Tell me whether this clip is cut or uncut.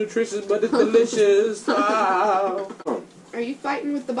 cut